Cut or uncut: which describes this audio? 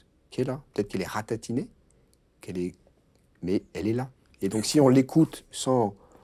uncut